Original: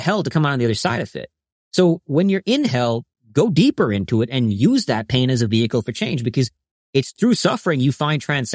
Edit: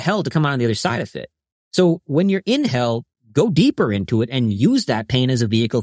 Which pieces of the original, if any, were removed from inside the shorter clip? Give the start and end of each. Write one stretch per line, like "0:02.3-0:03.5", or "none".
none